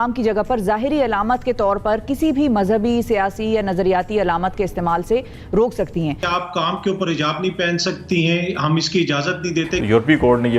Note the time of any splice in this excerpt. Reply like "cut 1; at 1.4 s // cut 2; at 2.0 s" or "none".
cut 1; at 6.2 s // cut 2; at 9.8 s